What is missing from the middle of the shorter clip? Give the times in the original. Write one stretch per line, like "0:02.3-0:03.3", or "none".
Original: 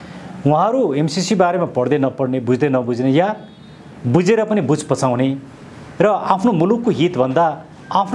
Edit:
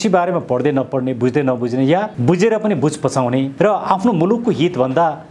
0:03.4-0:04.0
0:05.4-0:05.9